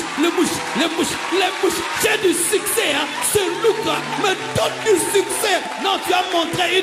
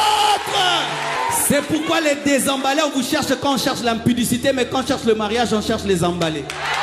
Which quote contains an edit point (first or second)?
second